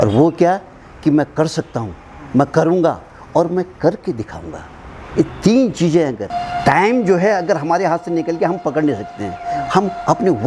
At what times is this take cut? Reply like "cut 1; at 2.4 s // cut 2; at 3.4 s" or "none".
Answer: cut 1; at 6.3 s